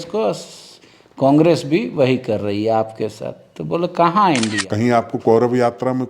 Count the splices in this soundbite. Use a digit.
1